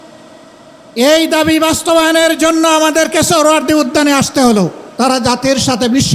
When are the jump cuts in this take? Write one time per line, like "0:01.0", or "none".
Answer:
0:04.8